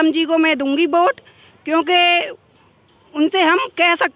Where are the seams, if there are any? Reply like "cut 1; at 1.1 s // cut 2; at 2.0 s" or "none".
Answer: none